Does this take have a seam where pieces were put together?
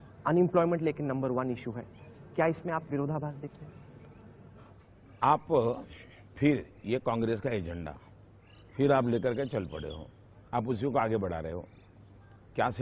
no; 0 cuts

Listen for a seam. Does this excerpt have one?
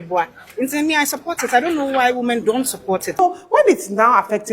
yes; 1 cut; at 3.2 s

